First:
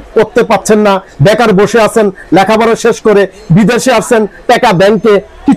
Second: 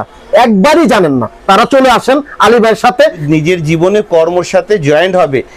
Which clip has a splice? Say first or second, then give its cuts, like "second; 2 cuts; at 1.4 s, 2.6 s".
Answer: second; 1 cut; at 3.2 s